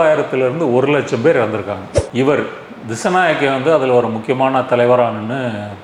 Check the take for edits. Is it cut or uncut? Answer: cut